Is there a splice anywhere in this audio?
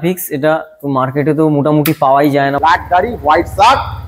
yes; 1 cut; at 2.6 s

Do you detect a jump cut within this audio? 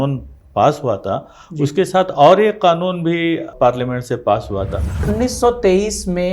yes; 1 cut; at 5.0 s

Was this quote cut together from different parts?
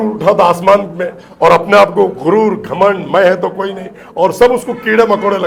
no; 0 cuts

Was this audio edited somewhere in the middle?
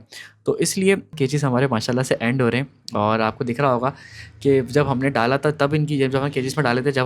yes; 1 cut; at 1.1 s

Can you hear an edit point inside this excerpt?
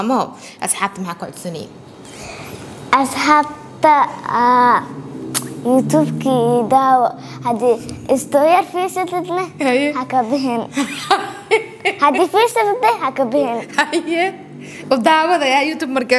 no; 0 cuts

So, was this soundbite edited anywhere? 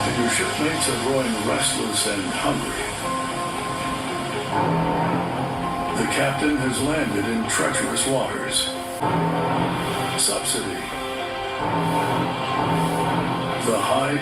yes; 1 cut; at 9.0 s

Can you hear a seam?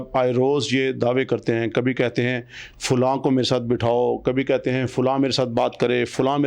no; 0 cuts

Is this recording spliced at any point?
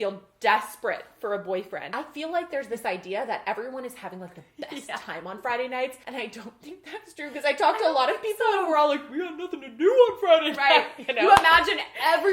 yes; 2 cuts; at 1.9 s, 6.0 s

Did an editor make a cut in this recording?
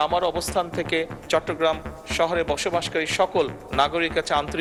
no; 0 cuts

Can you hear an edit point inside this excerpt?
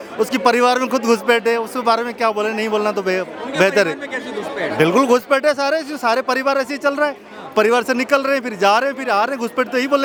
no; 0 cuts

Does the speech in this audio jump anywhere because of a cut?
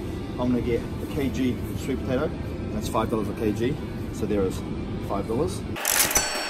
no; 0 cuts

